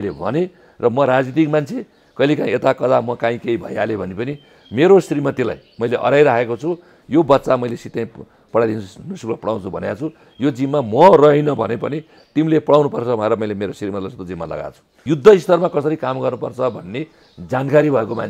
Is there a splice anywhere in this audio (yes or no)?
yes